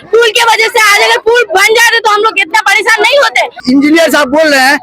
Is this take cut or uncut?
cut